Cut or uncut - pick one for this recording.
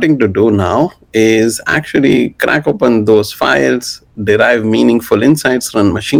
uncut